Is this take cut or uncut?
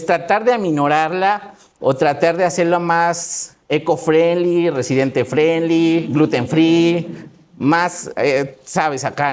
uncut